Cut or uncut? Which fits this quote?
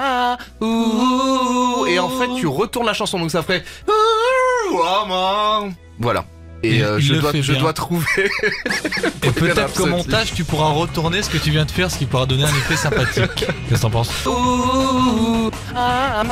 uncut